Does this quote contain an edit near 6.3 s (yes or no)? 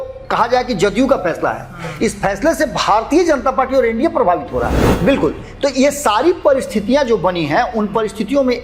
no